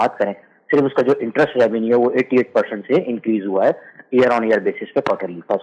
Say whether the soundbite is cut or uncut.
uncut